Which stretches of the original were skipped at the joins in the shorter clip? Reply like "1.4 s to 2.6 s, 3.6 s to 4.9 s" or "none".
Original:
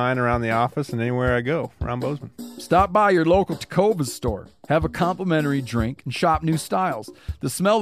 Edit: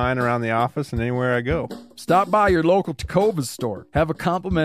1.8 s to 2.4 s, 4.4 s to 4.6 s